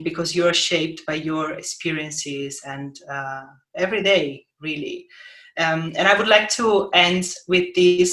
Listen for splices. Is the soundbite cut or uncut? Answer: uncut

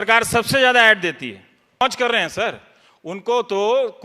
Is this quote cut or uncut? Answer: cut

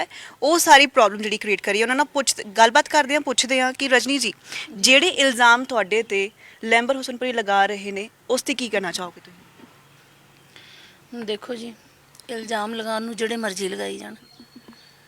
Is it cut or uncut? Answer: uncut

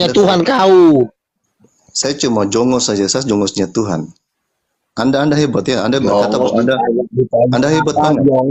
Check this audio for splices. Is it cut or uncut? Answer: uncut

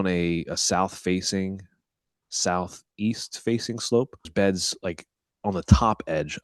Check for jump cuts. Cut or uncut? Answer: cut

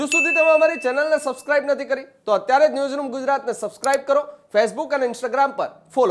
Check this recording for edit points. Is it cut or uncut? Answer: uncut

